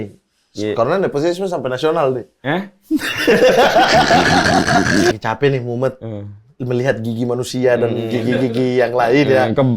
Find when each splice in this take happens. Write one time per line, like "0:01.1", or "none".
0:05.1